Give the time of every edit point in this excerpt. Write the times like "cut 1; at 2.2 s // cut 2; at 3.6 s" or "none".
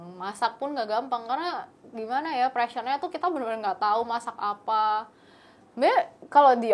none